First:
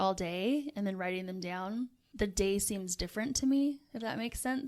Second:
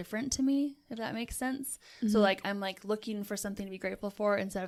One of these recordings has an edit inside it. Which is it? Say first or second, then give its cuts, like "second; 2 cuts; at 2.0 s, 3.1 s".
first; 1 cut; at 2.0 s